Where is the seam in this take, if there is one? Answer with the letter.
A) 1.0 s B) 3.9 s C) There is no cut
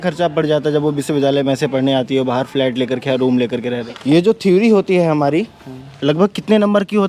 B